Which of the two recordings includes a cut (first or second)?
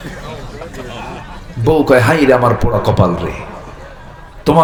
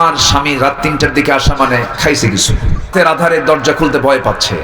second